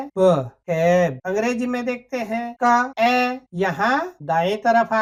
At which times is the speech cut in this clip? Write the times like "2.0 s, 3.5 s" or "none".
none